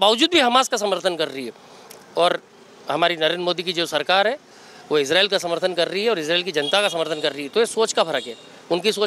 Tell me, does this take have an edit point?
no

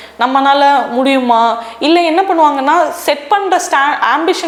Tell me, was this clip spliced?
no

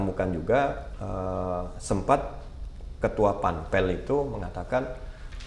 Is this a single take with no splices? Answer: yes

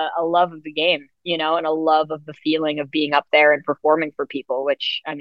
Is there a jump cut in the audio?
no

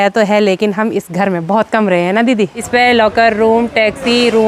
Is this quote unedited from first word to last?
no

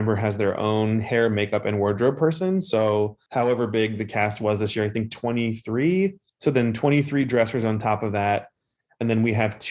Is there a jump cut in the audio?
no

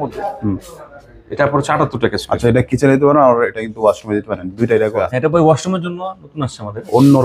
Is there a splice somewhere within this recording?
yes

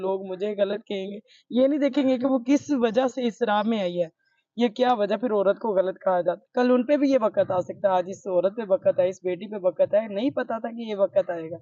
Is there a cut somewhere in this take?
yes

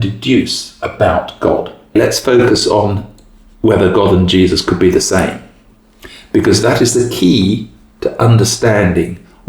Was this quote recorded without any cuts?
no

